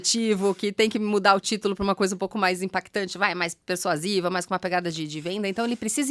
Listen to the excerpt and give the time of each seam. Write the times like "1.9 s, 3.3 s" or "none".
none